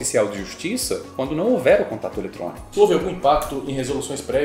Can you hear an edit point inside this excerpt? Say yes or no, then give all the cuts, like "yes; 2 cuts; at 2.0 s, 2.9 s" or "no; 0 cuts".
yes; 2 cuts; at 1.1 s, 2.6 s